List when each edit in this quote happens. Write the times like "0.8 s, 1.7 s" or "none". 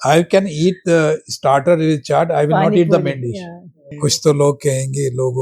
3.9 s